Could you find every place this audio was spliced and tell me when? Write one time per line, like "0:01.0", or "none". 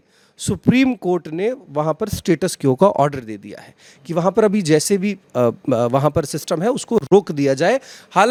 none